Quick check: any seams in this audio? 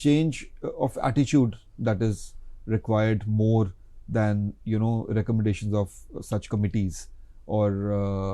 no; 0 cuts

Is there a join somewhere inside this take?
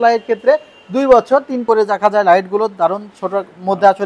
yes; 1 cut; at 1.7 s

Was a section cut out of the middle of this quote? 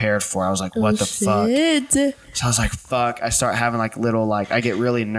no; 0 cuts

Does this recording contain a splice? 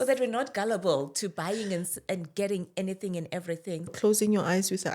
yes; 1 cut; at 3.9 s

